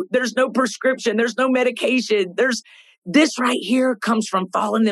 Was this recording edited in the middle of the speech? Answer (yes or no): no